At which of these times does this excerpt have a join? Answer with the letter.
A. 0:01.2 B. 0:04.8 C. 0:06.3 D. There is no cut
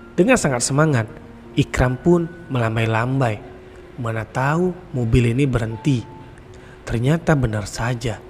D